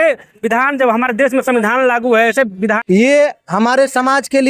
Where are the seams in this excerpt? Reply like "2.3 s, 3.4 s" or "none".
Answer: 2.8 s